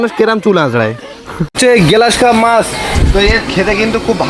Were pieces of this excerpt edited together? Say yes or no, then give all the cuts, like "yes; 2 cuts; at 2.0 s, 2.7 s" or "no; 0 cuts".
yes; 1 cut; at 1.5 s